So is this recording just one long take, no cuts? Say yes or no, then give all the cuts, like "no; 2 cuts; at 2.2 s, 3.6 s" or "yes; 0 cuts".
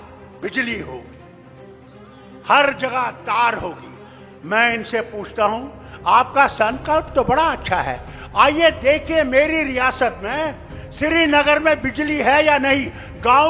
yes; 0 cuts